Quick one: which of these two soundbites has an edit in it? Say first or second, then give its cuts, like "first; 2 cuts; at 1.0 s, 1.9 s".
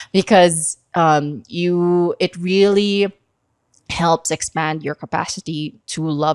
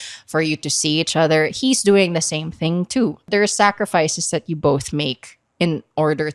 second; 1 cut; at 3.2 s